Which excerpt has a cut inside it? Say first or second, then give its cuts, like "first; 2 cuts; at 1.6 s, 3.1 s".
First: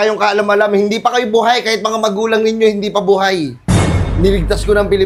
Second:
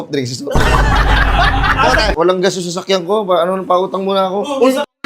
second; 1 cut; at 2.1 s